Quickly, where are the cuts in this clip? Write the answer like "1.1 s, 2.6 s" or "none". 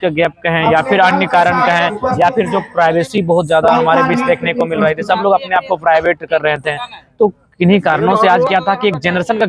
none

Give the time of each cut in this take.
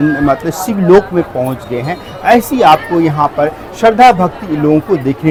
none

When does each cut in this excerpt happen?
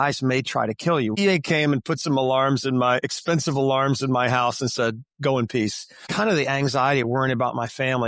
1.2 s, 6.1 s

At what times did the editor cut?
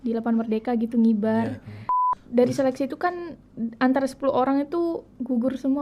2.1 s

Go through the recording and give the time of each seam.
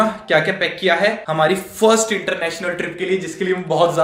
1.2 s

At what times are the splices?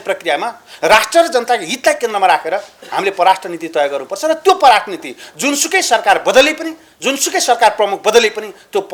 none

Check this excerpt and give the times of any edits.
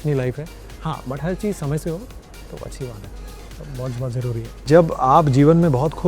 4.7 s

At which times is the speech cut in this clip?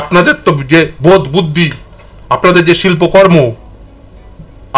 none

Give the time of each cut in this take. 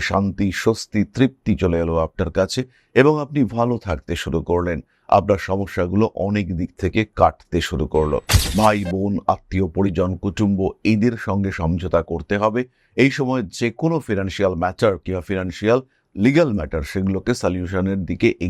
8.3 s

